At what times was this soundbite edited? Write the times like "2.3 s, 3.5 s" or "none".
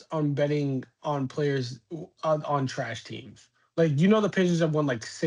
none